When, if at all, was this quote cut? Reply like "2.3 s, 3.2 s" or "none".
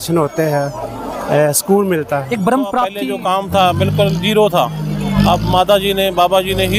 3.0 s